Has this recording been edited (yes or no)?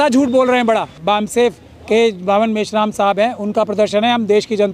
yes